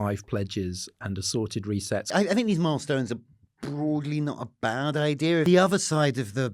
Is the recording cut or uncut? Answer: cut